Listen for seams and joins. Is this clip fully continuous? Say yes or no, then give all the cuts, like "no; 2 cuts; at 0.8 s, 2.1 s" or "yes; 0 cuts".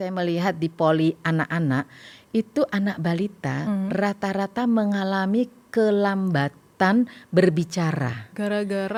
yes; 0 cuts